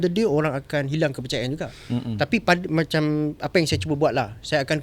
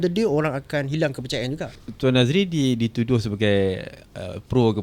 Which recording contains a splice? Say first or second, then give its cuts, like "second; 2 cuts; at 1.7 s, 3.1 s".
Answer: second; 1 cut; at 1.8 s